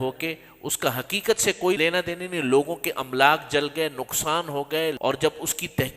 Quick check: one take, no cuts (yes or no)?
no